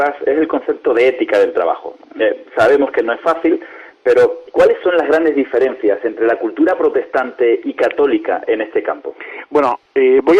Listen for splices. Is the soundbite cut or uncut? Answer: cut